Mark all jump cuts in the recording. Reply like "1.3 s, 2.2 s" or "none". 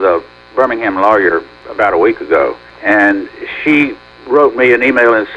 1.6 s, 2.7 s, 4.1 s